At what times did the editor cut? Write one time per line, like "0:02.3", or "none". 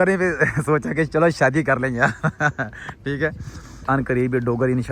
0:03.9